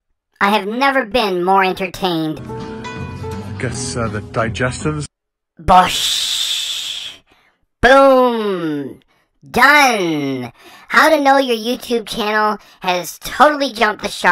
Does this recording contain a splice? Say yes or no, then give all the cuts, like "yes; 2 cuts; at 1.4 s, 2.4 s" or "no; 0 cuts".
yes; 1 cut; at 2.4 s